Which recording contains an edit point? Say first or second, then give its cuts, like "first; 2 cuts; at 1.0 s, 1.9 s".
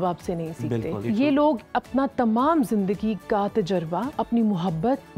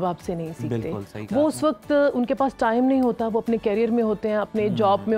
first; 2 cuts; at 1.0 s, 4.1 s